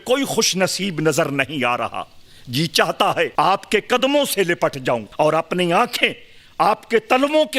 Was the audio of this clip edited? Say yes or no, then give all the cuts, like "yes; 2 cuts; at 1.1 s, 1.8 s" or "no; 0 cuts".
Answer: yes; 2 cuts; at 3.3 s, 5.1 s